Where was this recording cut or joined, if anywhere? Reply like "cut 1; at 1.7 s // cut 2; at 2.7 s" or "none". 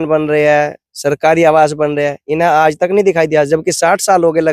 none